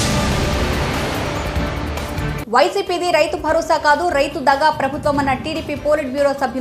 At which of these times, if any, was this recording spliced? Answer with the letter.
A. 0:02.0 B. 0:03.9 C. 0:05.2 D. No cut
A